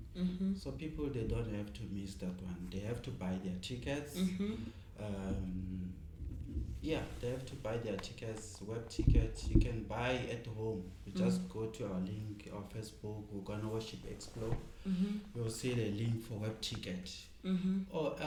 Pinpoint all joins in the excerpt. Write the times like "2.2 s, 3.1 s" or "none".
none